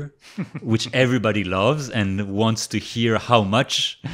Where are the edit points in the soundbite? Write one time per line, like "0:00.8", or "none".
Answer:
none